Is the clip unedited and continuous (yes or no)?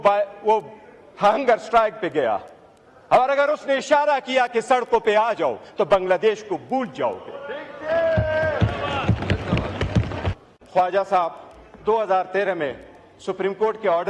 no